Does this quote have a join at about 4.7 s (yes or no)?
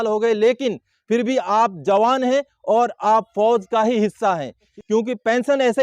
yes